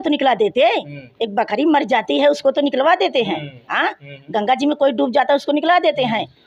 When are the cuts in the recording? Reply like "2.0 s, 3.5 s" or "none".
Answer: none